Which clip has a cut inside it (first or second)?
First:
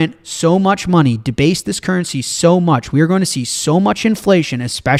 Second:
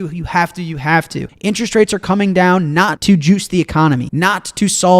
second